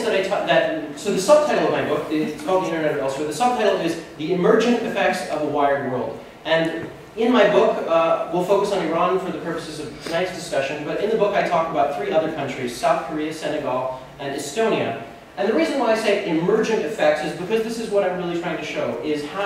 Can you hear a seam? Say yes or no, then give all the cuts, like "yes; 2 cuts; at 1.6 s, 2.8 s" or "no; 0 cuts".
no; 0 cuts